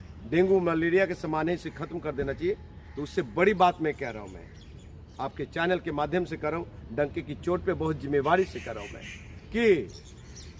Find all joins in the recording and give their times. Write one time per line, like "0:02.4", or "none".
none